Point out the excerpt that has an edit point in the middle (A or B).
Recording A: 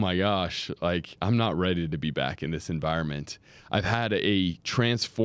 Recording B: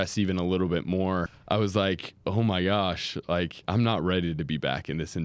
B